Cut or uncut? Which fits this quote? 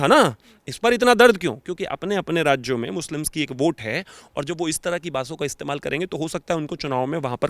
uncut